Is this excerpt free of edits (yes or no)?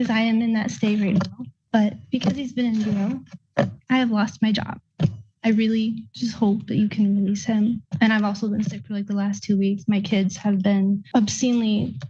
yes